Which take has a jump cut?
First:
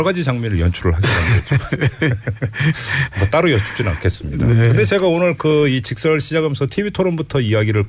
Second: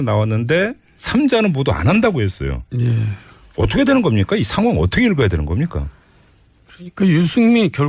first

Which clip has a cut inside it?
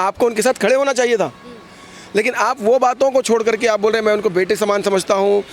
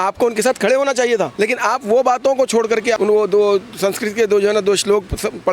second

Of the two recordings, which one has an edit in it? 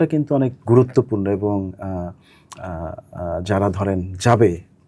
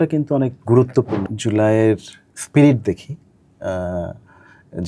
second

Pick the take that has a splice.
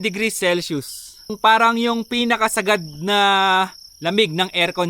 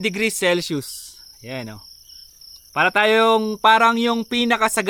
first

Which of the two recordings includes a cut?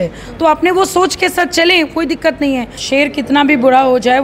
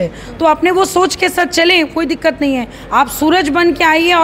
first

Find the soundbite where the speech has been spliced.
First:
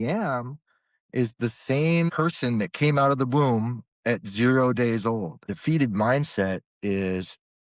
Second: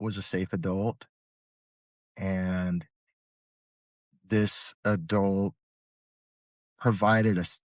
first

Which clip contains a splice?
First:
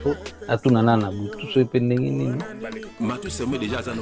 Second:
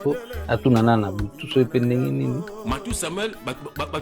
second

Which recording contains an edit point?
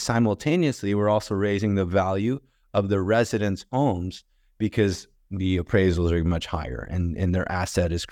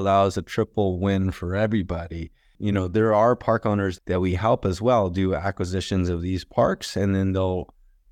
second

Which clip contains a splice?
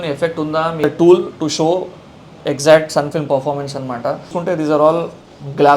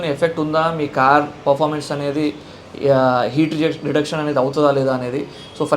first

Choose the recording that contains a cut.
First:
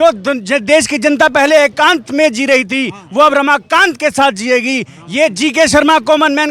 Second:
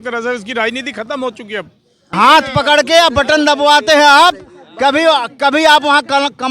second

